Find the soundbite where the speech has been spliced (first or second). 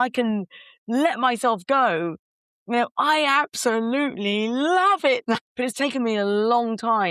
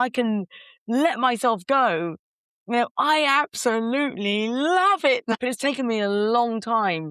second